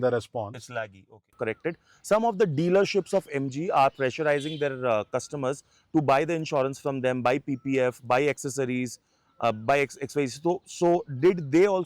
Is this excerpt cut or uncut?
cut